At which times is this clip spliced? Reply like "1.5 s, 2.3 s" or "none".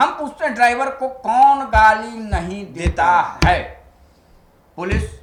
none